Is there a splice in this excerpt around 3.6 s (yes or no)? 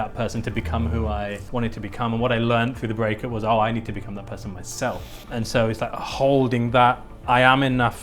no